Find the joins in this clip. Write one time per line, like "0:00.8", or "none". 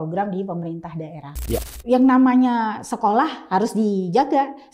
0:01.7